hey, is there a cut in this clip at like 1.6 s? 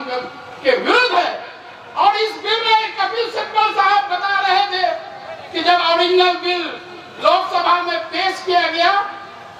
no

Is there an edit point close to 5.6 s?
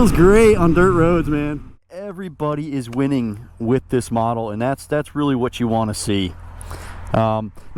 no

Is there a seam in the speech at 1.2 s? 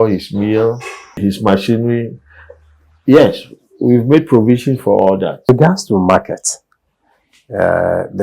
yes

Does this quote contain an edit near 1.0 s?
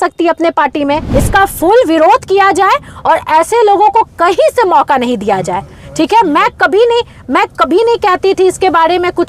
yes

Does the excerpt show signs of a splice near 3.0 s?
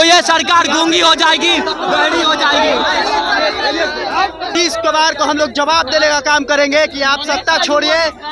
no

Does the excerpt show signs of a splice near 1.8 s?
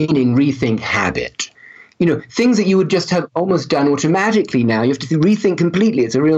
yes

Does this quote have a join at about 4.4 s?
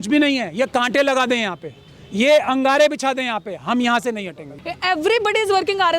yes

